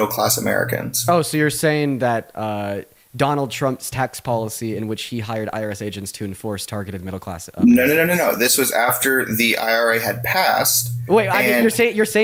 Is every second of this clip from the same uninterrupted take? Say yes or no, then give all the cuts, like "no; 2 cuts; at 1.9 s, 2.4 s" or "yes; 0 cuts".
yes; 0 cuts